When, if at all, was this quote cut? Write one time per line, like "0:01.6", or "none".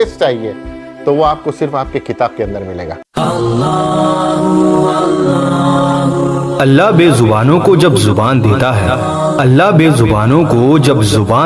0:03.0